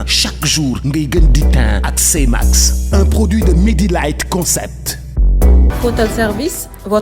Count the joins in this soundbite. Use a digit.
1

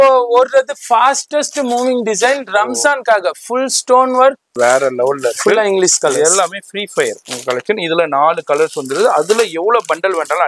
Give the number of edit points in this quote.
1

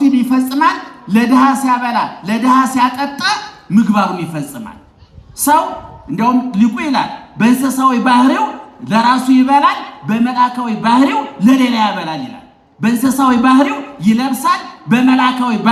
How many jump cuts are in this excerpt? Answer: 0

